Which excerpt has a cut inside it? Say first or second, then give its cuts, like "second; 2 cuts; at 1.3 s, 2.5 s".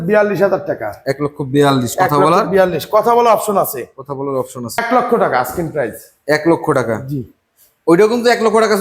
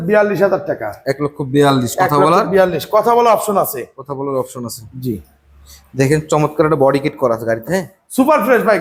first; 1 cut; at 4.8 s